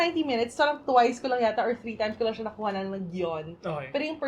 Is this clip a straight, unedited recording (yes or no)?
yes